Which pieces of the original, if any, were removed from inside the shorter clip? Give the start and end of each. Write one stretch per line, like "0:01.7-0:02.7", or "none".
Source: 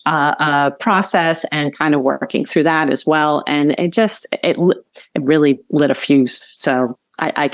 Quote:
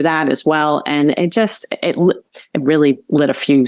none